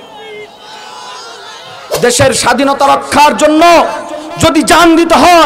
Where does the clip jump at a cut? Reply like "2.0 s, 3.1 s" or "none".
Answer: 1.8 s